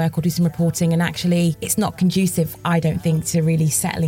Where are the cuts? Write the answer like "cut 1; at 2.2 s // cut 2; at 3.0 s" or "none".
cut 1; at 1.6 s